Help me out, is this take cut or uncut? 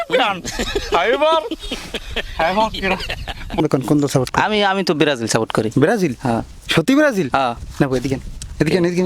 cut